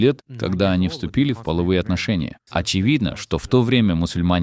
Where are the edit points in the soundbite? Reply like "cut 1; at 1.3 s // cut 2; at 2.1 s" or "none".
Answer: cut 1; at 2.4 s